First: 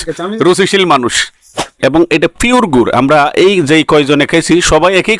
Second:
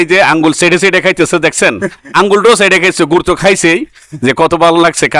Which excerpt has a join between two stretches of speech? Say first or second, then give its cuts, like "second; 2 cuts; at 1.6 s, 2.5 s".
first; 1 cut; at 1.7 s